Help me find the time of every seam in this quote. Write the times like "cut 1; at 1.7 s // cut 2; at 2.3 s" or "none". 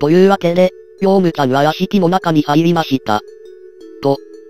none